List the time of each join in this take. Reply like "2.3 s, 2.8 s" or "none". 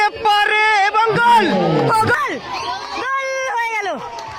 2.2 s